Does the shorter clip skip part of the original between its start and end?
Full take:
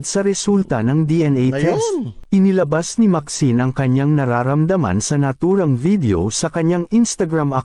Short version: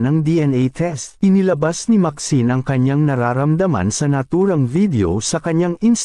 yes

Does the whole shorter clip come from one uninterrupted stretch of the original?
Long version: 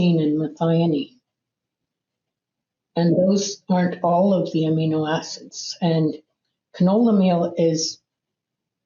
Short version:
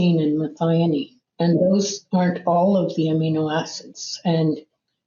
no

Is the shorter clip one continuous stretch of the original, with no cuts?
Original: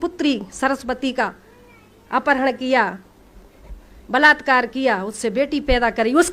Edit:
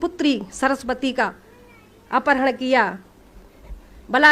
yes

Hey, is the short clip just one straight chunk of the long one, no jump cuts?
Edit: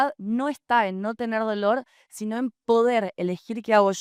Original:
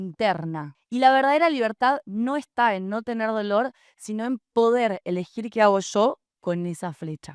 yes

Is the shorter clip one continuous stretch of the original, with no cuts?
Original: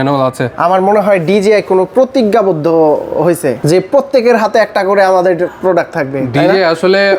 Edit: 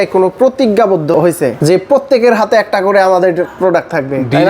no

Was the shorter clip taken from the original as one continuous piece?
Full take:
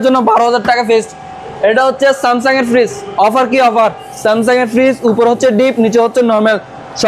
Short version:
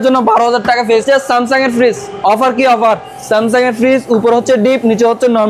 no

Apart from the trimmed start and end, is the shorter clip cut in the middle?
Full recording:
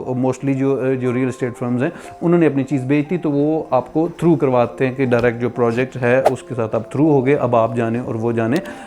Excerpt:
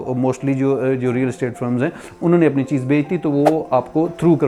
no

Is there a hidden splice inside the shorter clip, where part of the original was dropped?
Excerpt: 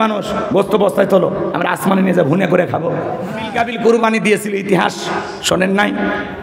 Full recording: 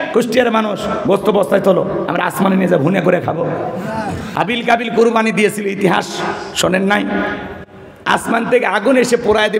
yes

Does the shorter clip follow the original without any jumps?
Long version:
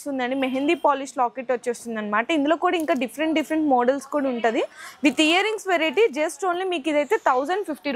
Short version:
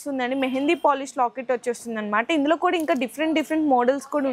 yes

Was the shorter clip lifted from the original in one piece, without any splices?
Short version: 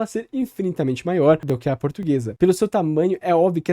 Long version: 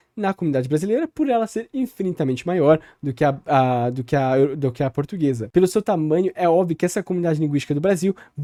no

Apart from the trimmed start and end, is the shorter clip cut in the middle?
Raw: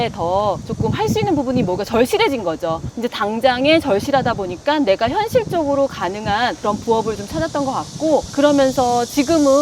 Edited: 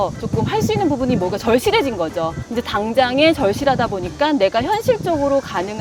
no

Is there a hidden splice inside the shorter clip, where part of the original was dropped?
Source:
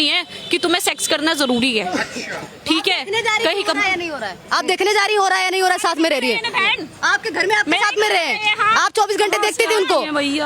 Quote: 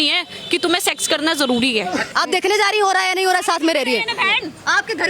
yes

